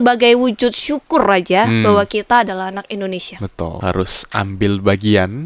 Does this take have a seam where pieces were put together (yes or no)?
yes